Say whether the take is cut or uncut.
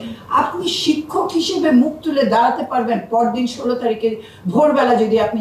uncut